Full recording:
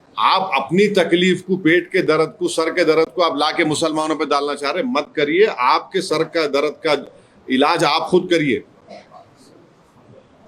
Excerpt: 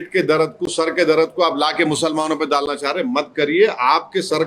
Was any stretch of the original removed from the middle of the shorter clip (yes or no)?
no